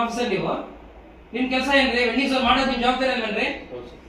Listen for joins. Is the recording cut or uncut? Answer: uncut